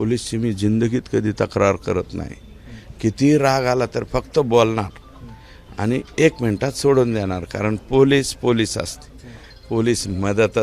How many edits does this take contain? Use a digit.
0